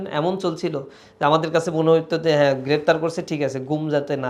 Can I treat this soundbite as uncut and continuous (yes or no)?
yes